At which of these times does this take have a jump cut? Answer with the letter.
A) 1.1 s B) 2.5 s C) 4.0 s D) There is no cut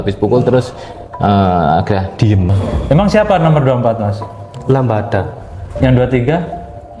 B